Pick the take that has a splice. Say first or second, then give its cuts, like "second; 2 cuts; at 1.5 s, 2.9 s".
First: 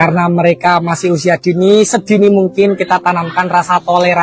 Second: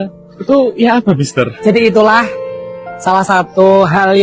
second; 1 cut; at 1.5 s